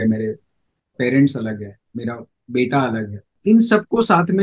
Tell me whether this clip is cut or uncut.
cut